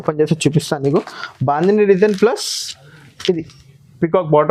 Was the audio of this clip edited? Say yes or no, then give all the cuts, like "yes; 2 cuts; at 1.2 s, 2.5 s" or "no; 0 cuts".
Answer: no; 0 cuts